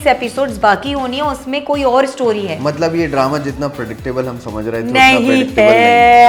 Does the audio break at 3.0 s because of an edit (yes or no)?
no